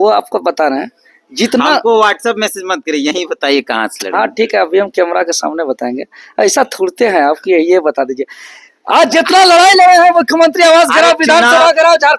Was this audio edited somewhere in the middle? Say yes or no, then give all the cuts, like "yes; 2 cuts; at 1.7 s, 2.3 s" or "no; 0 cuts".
no; 0 cuts